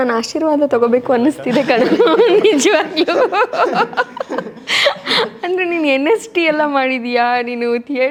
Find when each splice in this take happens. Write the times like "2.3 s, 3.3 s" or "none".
none